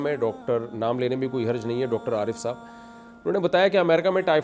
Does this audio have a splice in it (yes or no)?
no